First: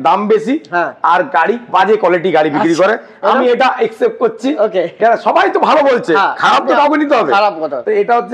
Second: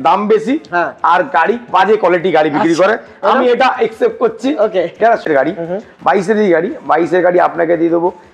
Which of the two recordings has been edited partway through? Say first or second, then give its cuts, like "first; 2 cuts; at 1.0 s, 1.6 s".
second; 1 cut; at 5.3 s